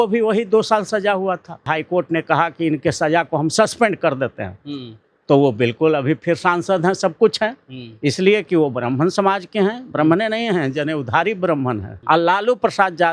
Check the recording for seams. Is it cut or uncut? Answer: cut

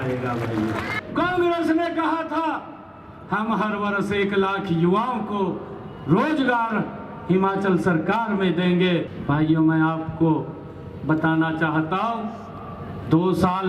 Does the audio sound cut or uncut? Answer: cut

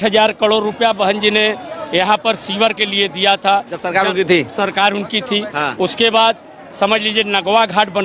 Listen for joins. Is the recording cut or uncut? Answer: uncut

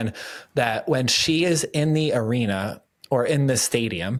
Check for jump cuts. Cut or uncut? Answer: uncut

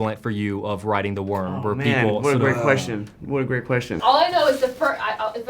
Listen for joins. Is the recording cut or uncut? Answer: cut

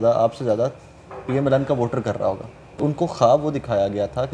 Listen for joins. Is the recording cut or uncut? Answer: cut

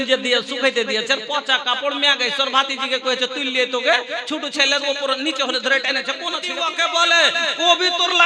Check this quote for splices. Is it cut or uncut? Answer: cut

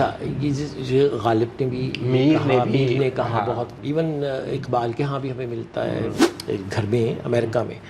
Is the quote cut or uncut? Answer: cut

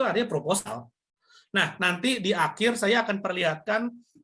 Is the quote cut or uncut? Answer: uncut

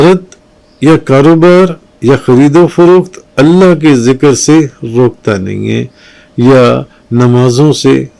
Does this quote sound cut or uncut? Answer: uncut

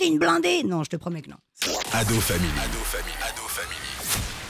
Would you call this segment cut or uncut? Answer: cut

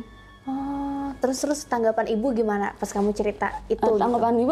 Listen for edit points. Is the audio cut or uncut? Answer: cut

